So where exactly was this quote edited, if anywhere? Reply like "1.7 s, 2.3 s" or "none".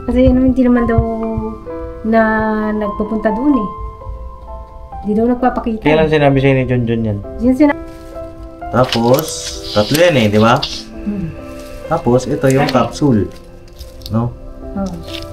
7.7 s

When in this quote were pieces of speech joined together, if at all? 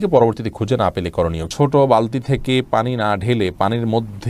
1.5 s

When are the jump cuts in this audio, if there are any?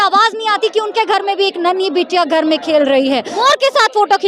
3.3 s

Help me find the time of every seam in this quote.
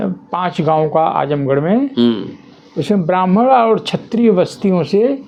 none

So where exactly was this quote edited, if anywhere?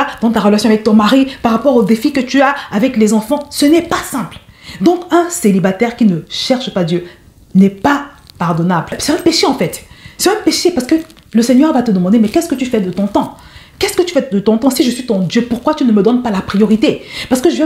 none

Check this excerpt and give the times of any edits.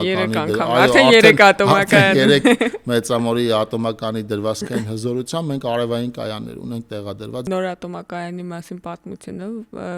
7.5 s

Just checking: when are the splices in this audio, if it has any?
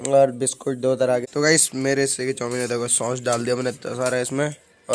1.2 s

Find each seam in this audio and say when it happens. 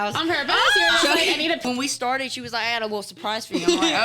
1.6 s

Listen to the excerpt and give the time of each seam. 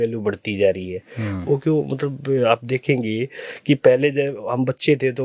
none

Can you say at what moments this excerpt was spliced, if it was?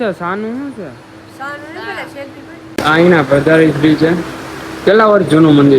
2.6 s

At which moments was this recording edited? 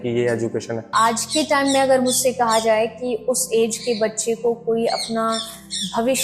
0.9 s

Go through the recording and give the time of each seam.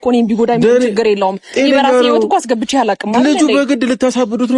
none

